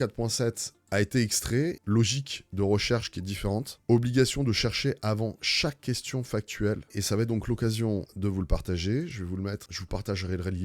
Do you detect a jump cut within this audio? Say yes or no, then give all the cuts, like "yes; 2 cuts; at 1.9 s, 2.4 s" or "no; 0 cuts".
yes; 4 cuts; at 1.8 s, 6.9 s, 8.1 s, 9.7 s